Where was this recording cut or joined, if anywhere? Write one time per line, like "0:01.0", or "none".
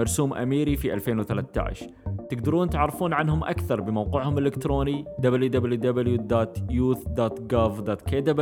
none